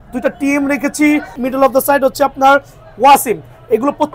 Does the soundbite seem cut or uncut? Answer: cut